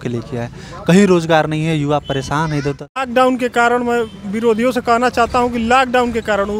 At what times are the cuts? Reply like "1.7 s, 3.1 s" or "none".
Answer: 3.0 s